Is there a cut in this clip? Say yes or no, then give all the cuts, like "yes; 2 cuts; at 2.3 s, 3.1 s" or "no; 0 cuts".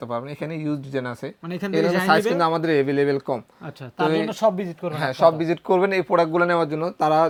no; 0 cuts